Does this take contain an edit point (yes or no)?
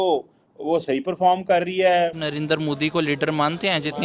yes